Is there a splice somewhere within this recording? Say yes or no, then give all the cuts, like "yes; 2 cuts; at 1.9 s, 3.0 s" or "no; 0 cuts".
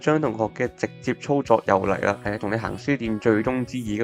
no; 0 cuts